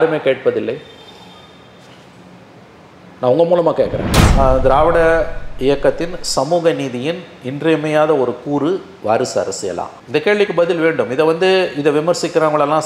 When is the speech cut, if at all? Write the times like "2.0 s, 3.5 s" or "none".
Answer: 4.2 s